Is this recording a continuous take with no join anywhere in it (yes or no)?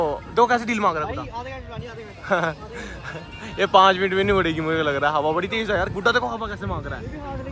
yes